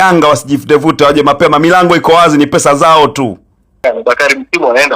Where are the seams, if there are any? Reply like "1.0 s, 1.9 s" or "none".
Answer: 4.0 s